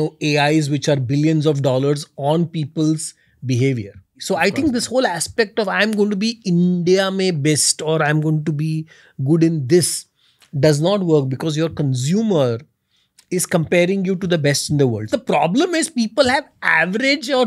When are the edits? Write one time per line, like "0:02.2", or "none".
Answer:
0:04.1
0:15.1